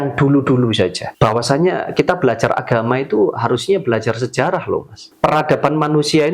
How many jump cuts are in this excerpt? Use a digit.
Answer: 2